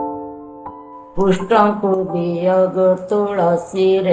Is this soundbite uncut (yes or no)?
no